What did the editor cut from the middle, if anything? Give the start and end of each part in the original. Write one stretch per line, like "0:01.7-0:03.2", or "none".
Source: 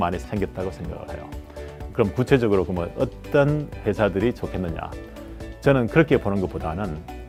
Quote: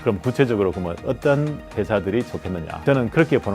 0:03.1-0:03.3
0:04.8-0:05.5